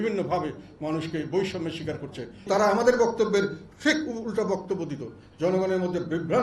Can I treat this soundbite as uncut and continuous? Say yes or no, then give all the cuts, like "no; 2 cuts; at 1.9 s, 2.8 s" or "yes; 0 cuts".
no; 1 cut; at 2.5 s